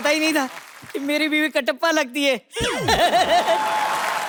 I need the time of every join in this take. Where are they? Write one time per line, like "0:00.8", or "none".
none